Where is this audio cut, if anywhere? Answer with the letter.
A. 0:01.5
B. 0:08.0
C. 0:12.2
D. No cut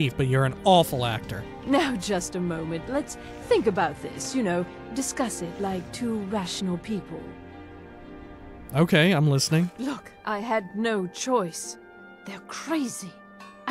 A